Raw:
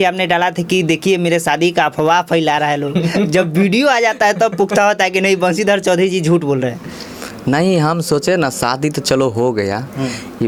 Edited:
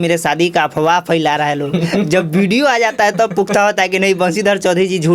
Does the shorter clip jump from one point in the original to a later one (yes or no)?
no